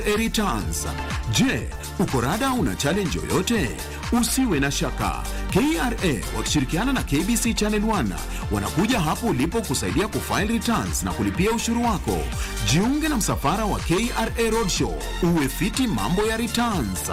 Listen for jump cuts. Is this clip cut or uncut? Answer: uncut